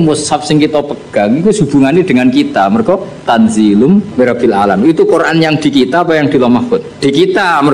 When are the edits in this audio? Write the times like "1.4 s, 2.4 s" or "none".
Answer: 4.1 s